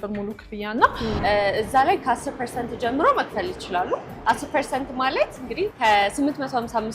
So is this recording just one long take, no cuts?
no; 1 cut; at 1.2 s

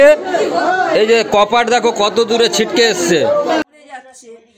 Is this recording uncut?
no; 1 cut; at 3.6 s

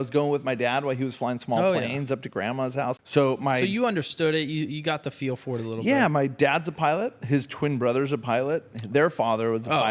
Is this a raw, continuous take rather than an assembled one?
no; 1 cut; at 3.0 s

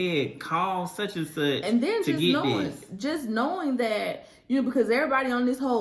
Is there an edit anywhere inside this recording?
no; 0 cuts

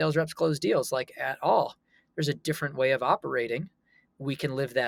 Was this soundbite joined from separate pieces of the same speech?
no; 0 cuts

